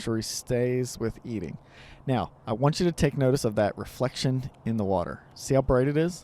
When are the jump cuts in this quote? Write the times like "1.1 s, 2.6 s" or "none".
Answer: none